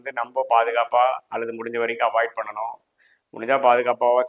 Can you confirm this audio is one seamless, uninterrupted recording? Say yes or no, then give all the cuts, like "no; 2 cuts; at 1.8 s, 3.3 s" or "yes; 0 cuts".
yes; 0 cuts